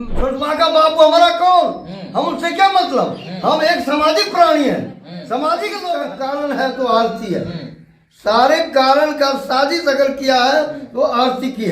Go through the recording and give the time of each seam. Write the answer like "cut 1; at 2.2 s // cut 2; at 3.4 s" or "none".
cut 1; at 6.1 s